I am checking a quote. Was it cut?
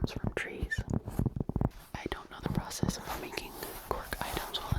yes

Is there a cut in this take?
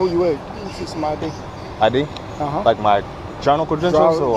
no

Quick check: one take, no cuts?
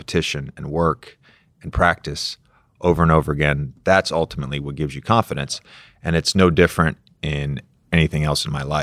no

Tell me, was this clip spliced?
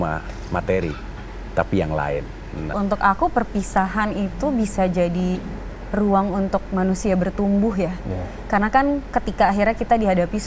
yes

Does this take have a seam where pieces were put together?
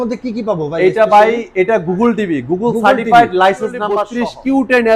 yes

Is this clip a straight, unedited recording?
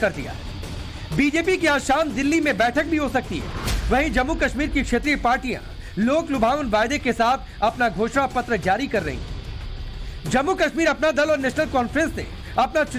yes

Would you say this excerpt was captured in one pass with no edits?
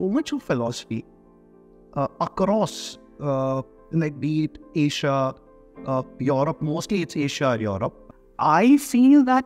no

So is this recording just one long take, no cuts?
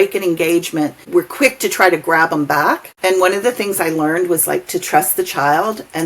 no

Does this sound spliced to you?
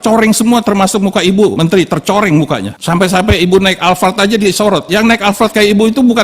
yes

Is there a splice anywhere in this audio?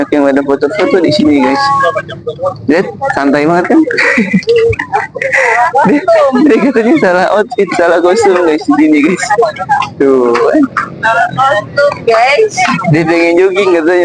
no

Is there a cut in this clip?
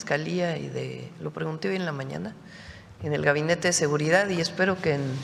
no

